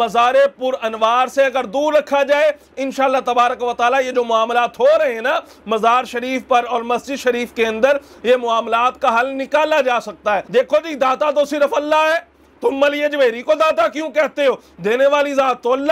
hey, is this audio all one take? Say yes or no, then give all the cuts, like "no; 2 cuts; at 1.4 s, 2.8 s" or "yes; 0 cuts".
no; 1 cut; at 10.5 s